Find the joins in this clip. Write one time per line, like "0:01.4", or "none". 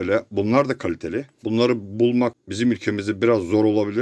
0:01.3
0:02.4